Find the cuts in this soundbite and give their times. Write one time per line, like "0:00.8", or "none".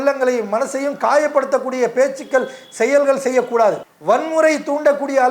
0:03.9